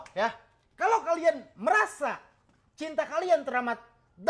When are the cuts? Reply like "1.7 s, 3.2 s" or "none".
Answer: none